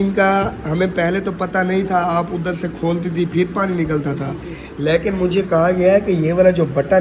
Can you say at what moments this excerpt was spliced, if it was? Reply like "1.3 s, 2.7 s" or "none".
none